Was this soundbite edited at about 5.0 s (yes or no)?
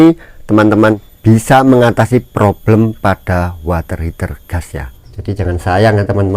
yes